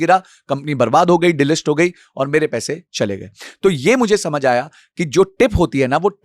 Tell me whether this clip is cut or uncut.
uncut